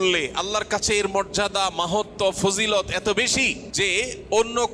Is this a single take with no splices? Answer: no; 1 cut; at 3.6 s

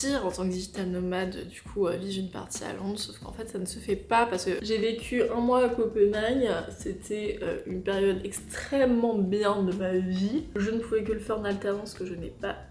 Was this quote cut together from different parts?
yes; 2 cuts; at 4.6 s, 10.5 s

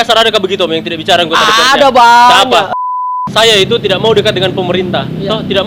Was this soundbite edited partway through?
yes; 1 cut; at 2.7 s

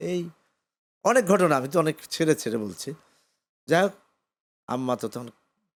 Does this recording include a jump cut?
no; 0 cuts

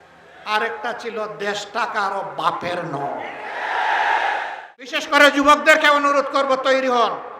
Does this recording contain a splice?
yes; 1 cut; at 5.0 s

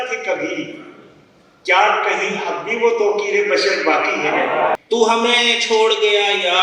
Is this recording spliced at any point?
yes; 1 cut; at 4.8 s

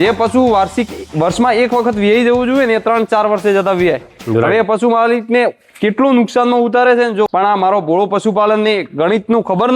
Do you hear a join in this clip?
yes; 1 cut; at 7.3 s

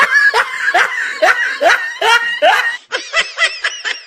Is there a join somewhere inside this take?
no; 0 cuts

